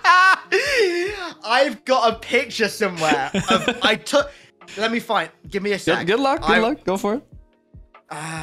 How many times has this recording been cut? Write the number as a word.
zero